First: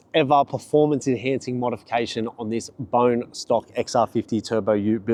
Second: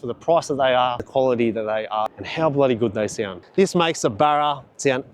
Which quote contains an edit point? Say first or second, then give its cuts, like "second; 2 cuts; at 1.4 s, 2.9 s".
second; 3 cuts; at 1.0 s, 2.2 s, 3.3 s